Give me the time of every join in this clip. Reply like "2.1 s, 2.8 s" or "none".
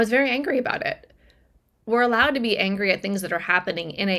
1.7 s

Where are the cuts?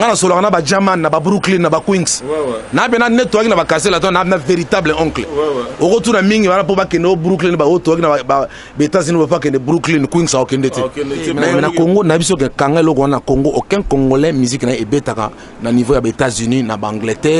11.6 s

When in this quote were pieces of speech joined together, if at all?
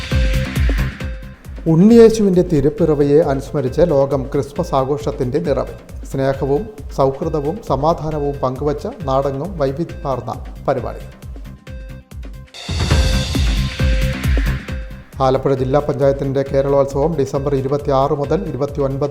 1.0 s

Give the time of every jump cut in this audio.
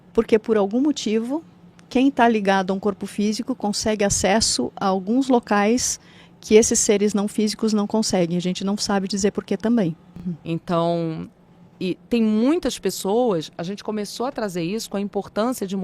10.3 s

